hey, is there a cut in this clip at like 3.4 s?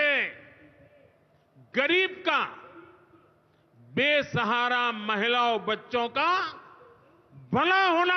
no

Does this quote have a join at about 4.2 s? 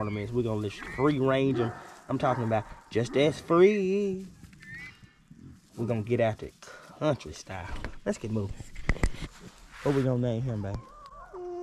no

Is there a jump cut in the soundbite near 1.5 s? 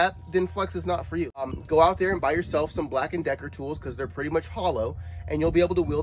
yes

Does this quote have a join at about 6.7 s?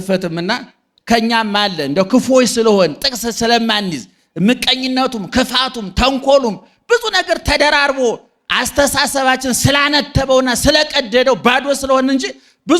no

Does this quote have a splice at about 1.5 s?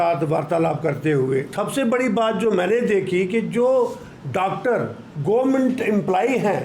yes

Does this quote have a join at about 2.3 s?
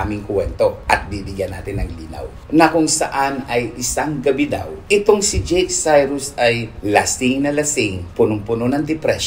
yes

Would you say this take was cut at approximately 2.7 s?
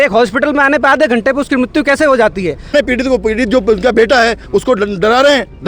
yes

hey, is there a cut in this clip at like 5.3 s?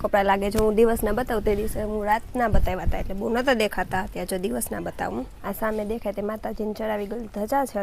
yes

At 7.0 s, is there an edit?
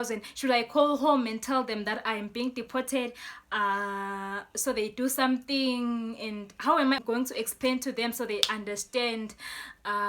yes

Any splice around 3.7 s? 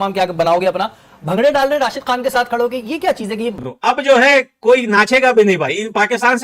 yes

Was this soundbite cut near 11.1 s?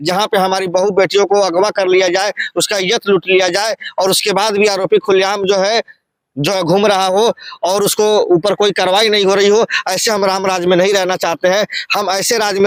no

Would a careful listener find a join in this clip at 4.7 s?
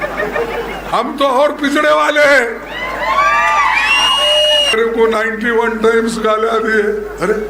yes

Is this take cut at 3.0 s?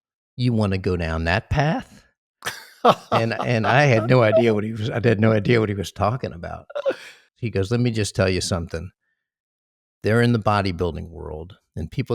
no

